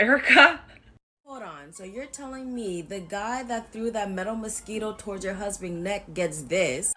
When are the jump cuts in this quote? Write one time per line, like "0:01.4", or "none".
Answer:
0:01.3

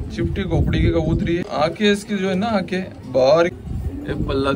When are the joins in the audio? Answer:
0:01.4
0:03.6

